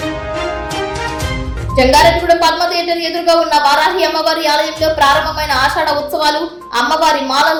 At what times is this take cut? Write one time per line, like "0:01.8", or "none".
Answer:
none